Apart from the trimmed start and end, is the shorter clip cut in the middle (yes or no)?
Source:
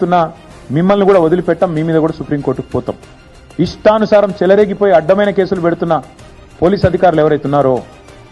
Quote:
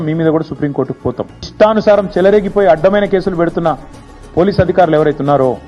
yes